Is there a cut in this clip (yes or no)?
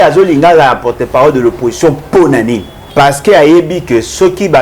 yes